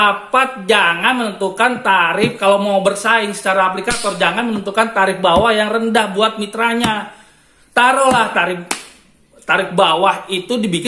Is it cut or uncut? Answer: uncut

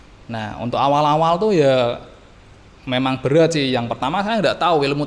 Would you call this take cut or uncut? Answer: uncut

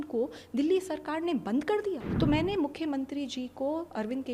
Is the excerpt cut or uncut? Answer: cut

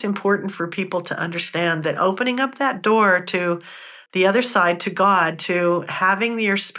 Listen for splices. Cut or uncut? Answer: uncut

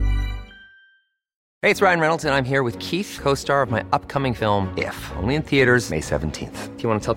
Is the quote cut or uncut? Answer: cut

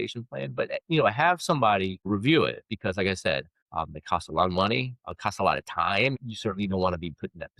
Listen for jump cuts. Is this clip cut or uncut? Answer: cut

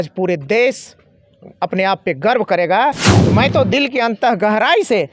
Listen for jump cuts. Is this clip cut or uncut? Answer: cut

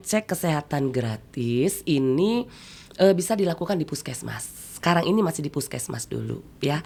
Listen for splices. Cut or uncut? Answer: uncut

